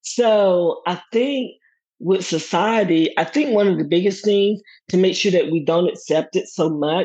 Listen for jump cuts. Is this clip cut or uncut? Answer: uncut